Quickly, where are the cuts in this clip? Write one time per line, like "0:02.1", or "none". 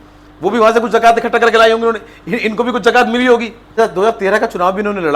0:03.6